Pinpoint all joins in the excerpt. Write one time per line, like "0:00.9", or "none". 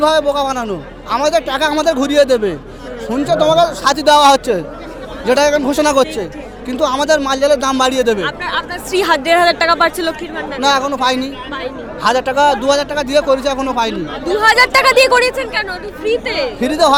none